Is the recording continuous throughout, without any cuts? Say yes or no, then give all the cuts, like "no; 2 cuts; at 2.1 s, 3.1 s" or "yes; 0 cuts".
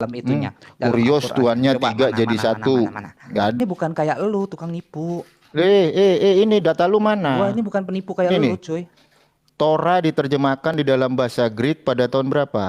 no; 1 cut; at 3.6 s